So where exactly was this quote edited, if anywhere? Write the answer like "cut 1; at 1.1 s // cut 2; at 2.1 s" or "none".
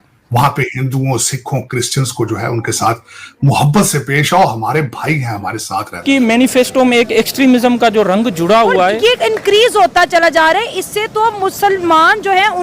cut 1; at 6.0 s